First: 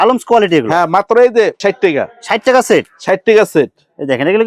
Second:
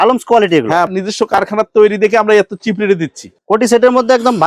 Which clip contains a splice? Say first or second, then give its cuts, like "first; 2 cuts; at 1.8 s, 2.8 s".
second; 2 cuts; at 0.9 s, 3.3 s